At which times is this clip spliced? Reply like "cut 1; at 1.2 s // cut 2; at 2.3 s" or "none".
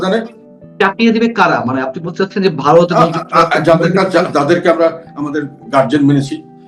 cut 1; at 1.0 s